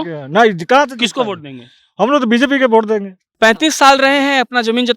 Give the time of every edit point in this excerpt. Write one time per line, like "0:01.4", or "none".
0:03.2